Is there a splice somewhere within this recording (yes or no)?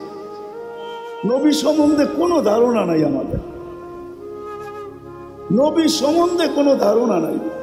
no